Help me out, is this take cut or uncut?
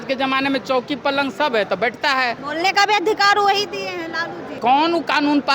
cut